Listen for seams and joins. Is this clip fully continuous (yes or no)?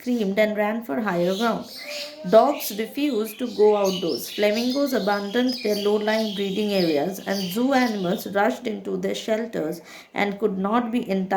yes